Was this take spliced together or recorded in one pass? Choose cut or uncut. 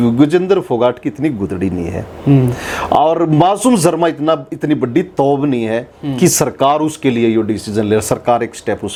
uncut